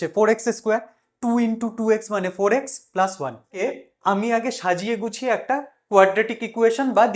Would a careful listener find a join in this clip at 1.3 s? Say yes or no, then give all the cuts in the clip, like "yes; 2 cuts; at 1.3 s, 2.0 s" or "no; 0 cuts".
no; 1 cut; at 3.6 s